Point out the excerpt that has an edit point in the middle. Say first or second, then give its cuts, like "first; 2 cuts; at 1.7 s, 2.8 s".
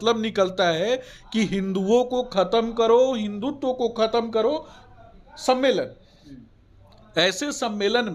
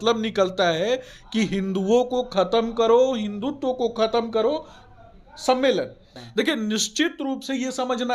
second; 1 cut; at 6.3 s